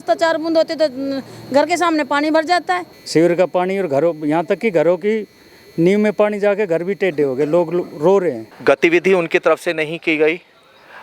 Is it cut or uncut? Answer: cut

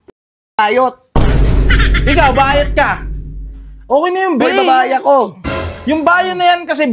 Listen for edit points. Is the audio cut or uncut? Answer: uncut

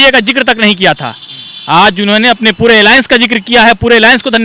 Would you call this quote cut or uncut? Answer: uncut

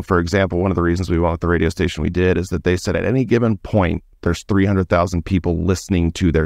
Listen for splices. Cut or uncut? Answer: uncut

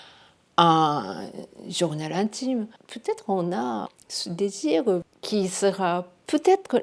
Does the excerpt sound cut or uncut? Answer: cut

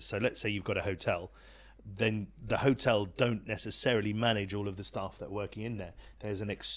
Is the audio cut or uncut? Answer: uncut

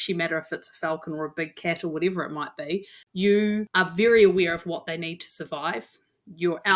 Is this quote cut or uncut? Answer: cut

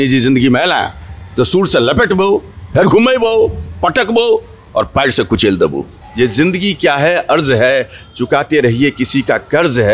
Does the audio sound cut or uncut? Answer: cut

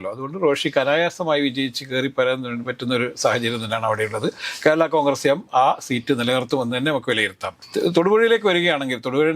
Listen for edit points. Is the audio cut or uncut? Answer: uncut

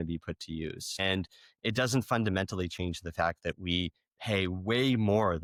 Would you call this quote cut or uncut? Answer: uncut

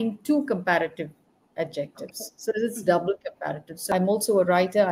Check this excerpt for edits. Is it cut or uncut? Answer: cut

